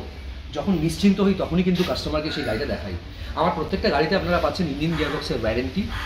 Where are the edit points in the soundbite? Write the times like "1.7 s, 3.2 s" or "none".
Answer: none